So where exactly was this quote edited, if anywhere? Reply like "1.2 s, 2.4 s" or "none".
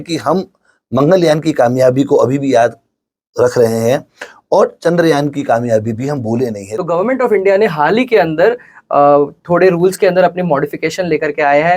6.7 s